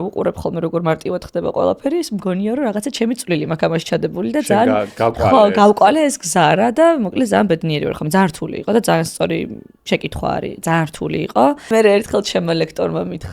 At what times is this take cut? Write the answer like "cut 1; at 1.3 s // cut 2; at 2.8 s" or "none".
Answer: cut 1; at 11.7 s